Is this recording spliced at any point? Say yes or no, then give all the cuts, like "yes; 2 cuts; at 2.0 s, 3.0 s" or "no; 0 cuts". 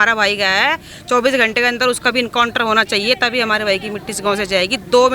no; 0 cuts